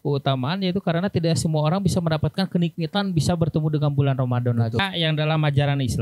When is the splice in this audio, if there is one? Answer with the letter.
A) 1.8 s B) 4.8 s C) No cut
B